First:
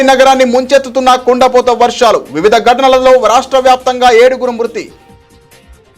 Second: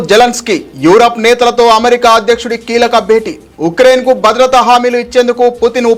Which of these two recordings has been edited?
first; 1 cut; at 4.9 s

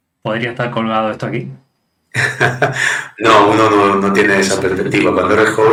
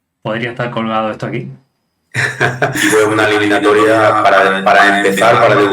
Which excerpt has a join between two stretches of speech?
second; 1 cut; at 2.8 s

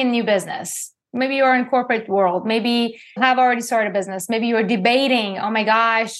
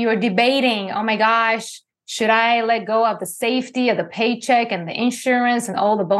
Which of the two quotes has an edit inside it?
first; 2 cuts; at 0.9 s, 3.2 s

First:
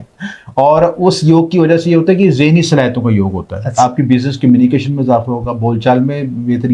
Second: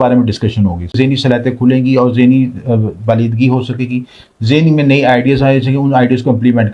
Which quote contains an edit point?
second; 1 cut; at 0.9 s

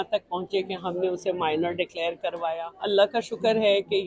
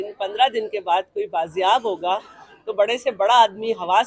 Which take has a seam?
first; 1 cut; at 2.6 s

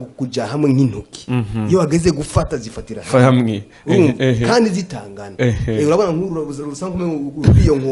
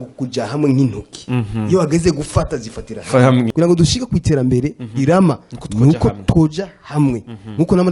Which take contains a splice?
second; 1 cut; at 3.5 s

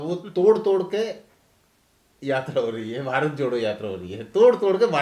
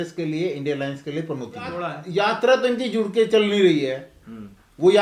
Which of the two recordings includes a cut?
second; 1 cut; at 2.0 s

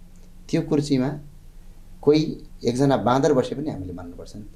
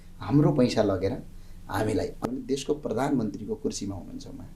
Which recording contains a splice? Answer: second; 1 cut; at 2.2 s

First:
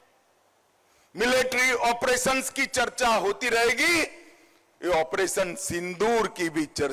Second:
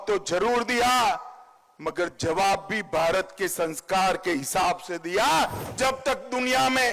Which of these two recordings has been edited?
second; 1 cut; at 5.6 s

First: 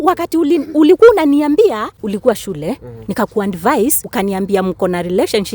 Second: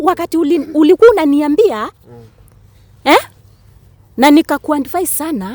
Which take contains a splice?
first; 2 cuts; at 2.0 s, 4.1 s

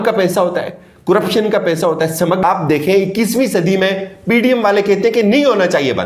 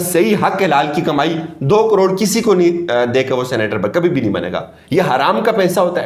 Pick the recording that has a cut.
first; 1 cut; at 2.4 s

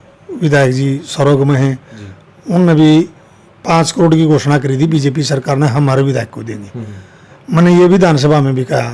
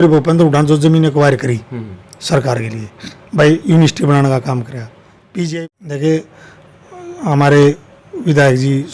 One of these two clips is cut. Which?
second; 1 cut; at 5.6 s

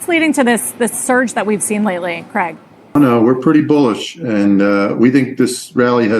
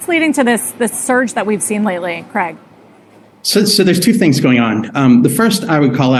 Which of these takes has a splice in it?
first; 1 cut; at 2.9 s

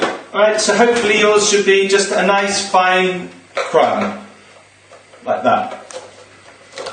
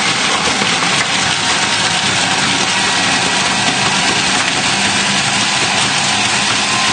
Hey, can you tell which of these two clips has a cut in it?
first; 1 cut; at 2.9 s

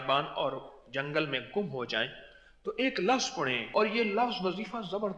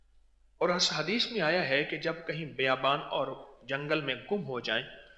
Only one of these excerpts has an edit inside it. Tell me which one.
first; 1 cut; at 3.7 s

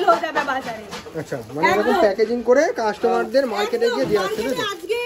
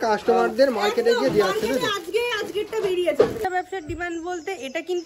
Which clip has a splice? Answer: second; 1 cut; at 3.4 s

